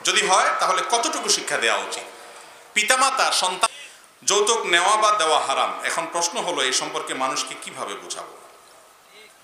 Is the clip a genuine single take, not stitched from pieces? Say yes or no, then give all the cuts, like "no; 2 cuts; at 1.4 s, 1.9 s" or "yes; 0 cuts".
no; 1 cut; at 3.7 s